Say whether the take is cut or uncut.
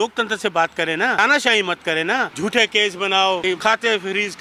cut